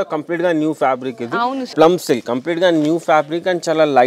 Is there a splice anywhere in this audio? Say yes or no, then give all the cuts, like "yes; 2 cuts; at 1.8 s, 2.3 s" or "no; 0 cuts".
yes; 1 cut; at 1.6 s